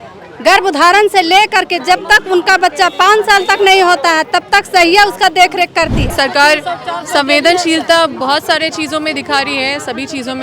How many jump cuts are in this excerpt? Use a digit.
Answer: 1